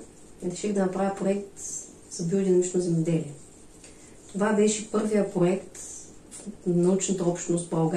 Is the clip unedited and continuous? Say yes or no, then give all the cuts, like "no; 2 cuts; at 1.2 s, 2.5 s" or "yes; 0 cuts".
yes; 0 cuts